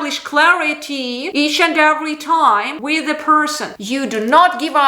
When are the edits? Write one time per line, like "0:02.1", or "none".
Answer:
0:03.7

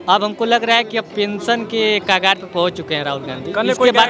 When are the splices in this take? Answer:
none

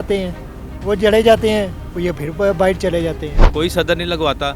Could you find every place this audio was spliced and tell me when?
0:03.3

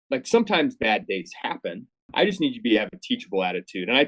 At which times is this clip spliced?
0:02.1

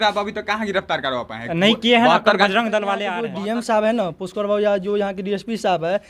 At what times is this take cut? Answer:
0:03.1

